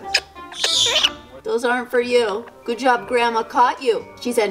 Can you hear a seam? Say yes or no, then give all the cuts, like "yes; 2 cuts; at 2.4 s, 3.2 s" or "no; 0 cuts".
no; 0 cuts